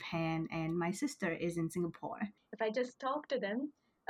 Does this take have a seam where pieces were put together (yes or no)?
yes